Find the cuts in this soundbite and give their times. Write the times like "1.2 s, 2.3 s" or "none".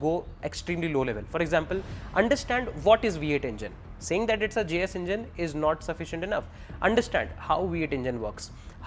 none